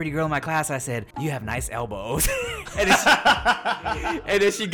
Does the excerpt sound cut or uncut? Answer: cut